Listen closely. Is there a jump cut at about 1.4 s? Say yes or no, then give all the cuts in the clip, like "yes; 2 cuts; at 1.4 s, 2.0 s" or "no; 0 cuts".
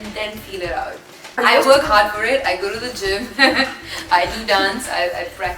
yes; 1 cut; at 1.4 s